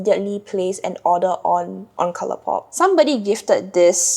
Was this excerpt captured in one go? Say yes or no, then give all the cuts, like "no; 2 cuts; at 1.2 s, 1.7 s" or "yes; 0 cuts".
no; 1 cut; at 2.7 s